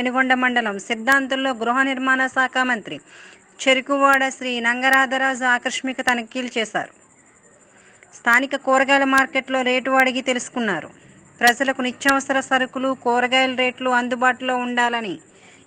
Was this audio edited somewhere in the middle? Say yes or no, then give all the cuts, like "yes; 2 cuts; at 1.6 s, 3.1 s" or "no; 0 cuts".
no; 0 cuts